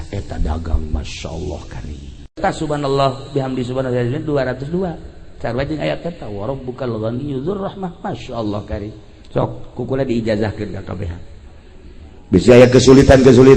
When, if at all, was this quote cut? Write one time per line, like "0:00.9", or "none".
0:02.4